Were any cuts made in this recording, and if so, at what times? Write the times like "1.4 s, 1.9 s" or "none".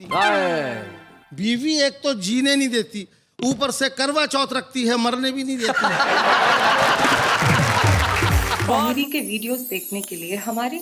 8.7 s